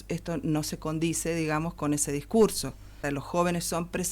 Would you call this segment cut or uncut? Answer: cut